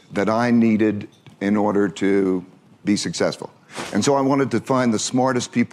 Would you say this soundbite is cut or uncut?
uncut